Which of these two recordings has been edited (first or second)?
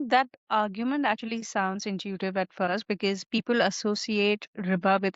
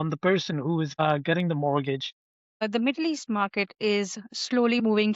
second